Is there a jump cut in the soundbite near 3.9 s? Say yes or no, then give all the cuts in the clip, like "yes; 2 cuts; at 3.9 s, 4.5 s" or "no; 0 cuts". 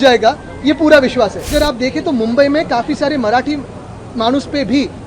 no; 1 cut; at 1.5 s